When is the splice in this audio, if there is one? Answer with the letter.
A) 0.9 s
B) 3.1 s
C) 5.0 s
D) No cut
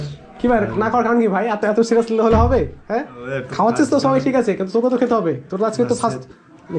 D